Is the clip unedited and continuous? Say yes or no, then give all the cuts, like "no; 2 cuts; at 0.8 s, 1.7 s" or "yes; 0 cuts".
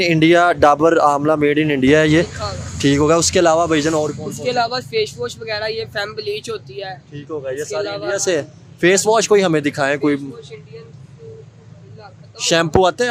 yes; 0 cuts